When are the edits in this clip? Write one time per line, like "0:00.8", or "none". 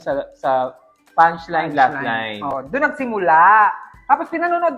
0:02.5